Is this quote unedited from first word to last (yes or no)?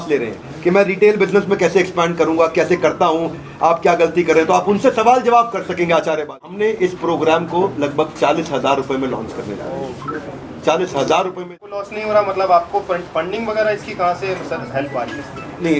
no